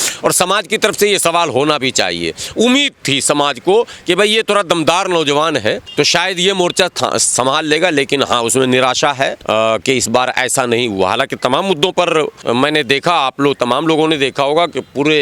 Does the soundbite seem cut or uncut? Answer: cut